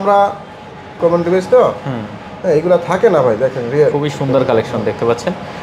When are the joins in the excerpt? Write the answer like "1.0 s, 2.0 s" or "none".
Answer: 0.9 s